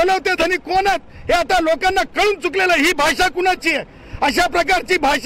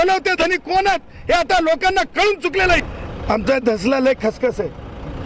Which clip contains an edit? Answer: second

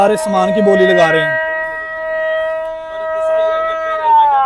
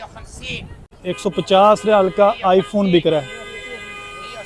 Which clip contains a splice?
second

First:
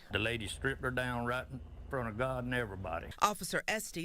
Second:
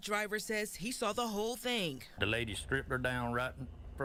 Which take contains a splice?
first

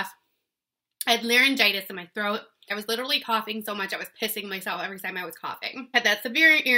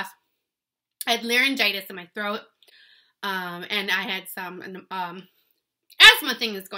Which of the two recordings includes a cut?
first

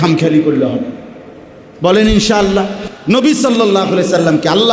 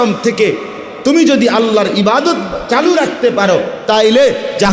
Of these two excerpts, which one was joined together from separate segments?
first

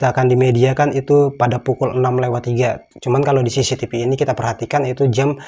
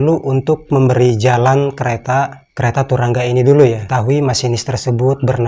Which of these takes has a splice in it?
second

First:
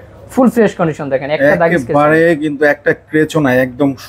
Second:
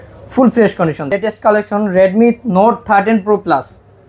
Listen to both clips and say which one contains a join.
second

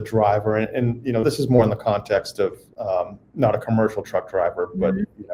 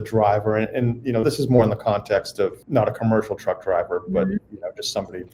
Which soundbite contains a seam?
second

